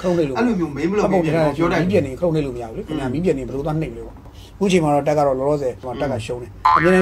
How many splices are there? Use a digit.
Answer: 1